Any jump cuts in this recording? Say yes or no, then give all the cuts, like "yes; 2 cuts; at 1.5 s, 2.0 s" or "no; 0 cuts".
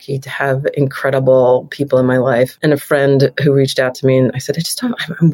yes; 1 cut; at 2.5 s